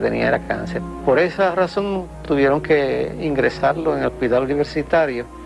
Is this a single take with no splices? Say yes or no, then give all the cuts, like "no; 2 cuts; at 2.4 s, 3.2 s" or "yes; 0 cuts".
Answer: yes; 0 cuts